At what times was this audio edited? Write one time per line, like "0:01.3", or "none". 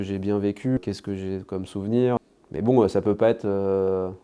0:00.8
0:02.2